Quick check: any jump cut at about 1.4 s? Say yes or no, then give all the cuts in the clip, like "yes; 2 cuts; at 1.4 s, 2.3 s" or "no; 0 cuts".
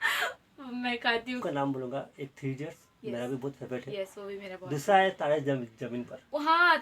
yes; 1 cut; at 1.4 s